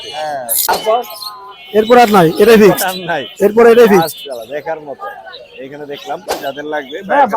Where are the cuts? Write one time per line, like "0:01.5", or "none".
0:00.7
0:06.3